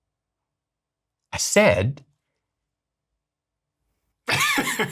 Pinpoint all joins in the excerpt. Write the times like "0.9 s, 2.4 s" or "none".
none